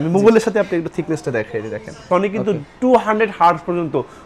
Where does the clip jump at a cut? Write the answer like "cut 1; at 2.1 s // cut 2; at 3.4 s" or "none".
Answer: cut 1; at 2.0 s